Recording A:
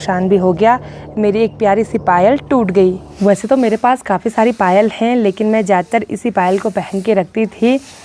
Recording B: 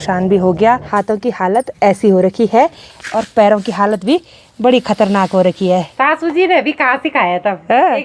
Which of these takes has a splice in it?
B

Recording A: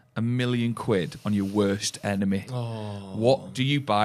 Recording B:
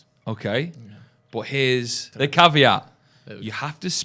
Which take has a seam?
B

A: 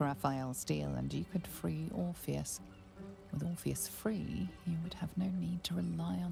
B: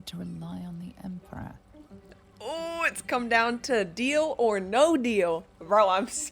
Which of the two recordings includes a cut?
B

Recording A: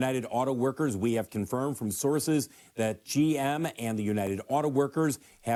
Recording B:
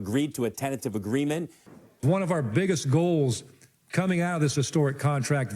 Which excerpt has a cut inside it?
B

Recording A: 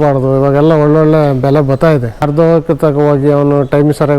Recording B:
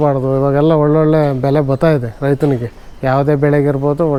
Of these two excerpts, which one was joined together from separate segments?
A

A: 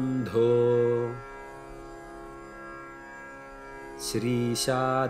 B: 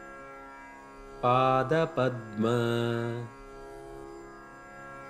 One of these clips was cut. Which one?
B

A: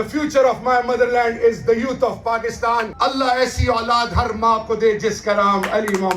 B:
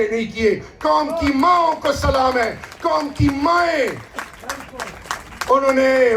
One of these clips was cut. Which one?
A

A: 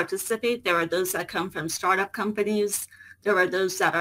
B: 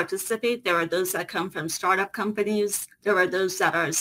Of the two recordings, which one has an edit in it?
B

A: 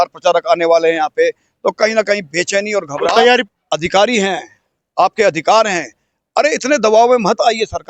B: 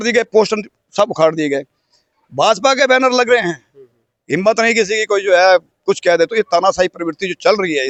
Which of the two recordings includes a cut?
A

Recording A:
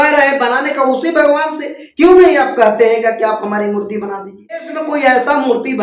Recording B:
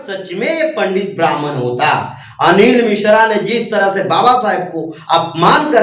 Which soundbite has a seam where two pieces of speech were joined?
A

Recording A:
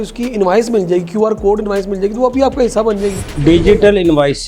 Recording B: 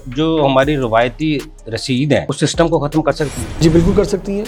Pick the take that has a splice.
A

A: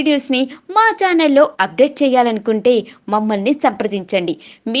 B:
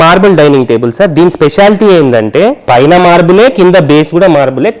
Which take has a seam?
B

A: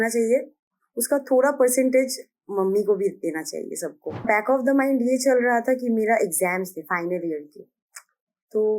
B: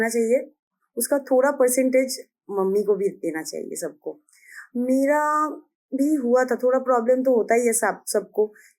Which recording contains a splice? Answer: A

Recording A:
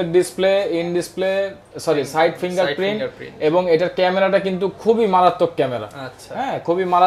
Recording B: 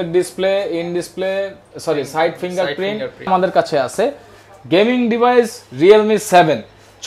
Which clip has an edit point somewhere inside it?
B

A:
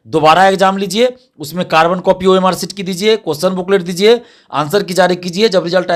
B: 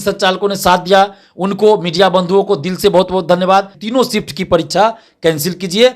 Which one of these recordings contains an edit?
B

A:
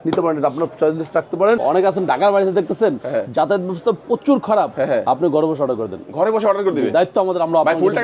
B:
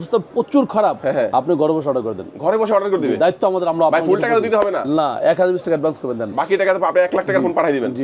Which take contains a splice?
A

